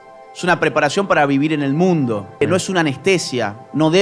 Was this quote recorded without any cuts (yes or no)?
no